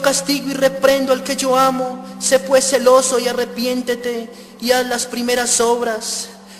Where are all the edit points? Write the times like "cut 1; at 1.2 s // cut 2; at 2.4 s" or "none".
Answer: cut 1; at 3.1 s